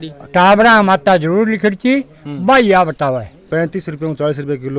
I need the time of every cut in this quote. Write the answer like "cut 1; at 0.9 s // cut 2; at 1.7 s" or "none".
cut 1; at 3.4 s